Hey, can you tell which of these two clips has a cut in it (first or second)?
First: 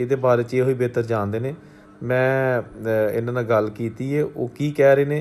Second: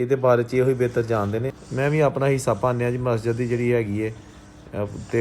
second